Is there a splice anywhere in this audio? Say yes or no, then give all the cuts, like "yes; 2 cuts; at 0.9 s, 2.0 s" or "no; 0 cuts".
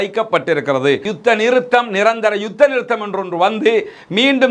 yes; 1 cut; at 1.1 s